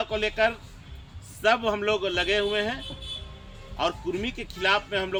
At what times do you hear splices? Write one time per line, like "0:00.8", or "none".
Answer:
none